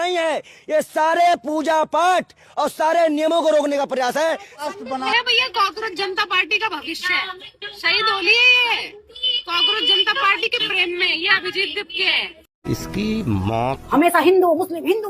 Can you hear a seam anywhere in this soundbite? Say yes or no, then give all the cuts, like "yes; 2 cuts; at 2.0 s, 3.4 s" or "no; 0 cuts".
yes; 2 cuts; at 5.1 s, 13.8 s